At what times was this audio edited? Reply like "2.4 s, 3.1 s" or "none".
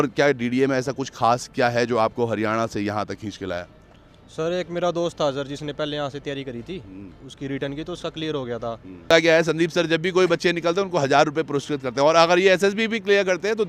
9.1 s

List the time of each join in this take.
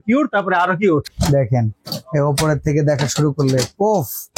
1.1 s

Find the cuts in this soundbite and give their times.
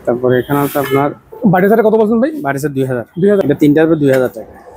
3.4 s

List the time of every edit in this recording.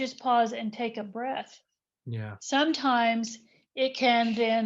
1.1 s

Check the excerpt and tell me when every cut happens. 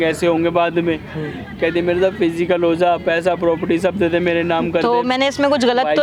none

